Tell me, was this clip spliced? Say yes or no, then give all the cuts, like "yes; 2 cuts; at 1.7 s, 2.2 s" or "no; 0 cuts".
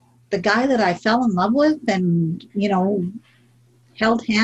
no; 0 cuts